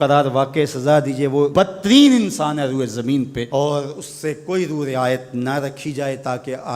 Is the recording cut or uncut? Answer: cut